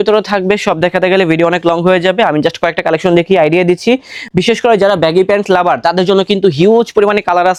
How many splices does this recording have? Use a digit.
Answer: 0